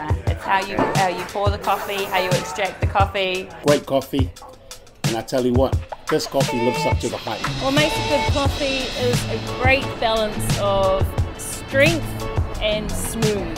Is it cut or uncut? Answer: cut